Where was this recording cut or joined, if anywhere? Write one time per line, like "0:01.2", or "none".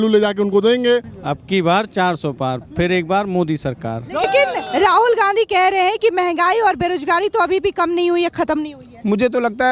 0:01.1
0:04.2